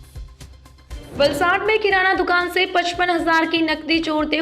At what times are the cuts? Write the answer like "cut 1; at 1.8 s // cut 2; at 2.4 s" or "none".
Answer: cut 1; at 1.1 s